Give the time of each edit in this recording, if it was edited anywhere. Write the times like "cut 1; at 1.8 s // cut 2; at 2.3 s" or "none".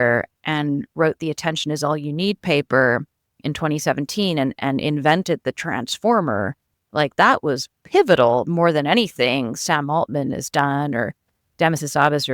none